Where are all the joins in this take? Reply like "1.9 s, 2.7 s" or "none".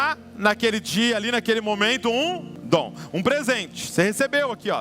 2.5 s